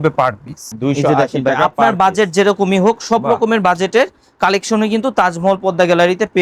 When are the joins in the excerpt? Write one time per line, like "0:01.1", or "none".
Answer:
none